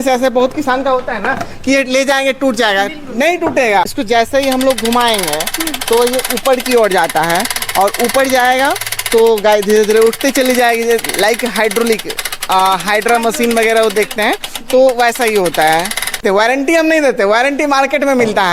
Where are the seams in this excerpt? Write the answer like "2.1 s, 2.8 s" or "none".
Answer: 3.9 s, 16.2 s